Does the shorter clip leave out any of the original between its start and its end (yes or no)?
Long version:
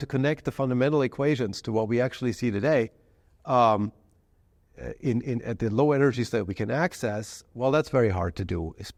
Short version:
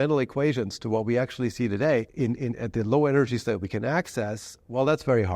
yes